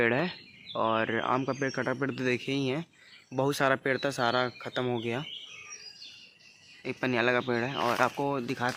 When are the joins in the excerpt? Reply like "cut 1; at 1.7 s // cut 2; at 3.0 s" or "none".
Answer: none